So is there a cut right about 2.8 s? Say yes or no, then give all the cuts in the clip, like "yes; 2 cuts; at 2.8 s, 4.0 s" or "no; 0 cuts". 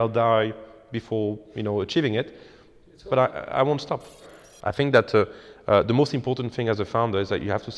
no; 1 cut; at 4.2 s